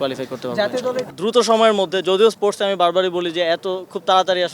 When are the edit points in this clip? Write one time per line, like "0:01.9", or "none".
0:01.1